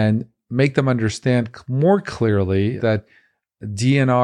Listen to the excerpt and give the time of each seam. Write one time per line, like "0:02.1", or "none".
0:02.8